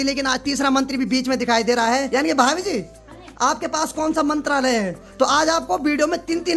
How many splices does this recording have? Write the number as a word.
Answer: zero